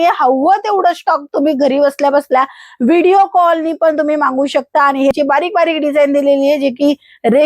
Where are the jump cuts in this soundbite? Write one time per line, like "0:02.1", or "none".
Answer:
0:05.1